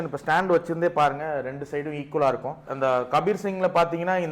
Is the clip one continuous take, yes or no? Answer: no